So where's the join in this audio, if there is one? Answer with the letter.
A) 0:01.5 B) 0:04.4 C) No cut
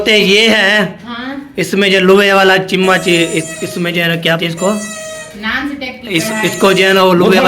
B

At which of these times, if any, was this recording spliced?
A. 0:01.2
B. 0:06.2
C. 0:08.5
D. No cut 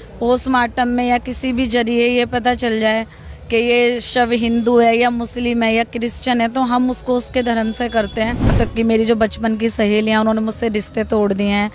C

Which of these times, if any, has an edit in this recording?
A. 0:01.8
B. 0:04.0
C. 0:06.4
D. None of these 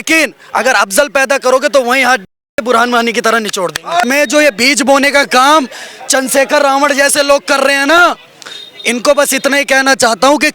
B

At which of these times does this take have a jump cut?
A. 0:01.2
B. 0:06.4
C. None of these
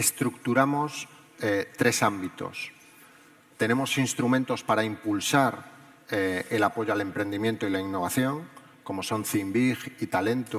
B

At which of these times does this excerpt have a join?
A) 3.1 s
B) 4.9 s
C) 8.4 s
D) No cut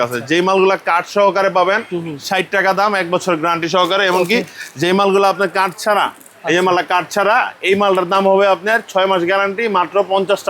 D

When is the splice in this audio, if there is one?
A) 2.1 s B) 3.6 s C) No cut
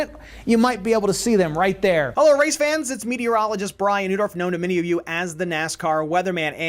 A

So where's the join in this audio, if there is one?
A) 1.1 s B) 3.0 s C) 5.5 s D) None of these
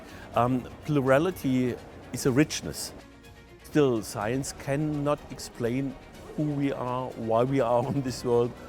B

